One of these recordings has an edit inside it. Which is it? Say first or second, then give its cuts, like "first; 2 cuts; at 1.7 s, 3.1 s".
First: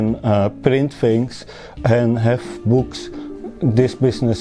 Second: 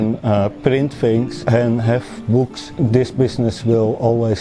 second; 2 cuts; at 1.4 s, 2.6 s